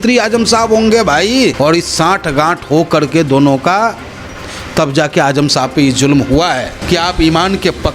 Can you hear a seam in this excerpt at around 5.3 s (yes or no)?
no